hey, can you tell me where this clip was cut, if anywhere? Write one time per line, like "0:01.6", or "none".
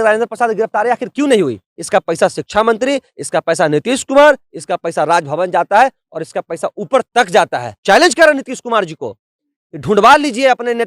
0:01.7
0:07.8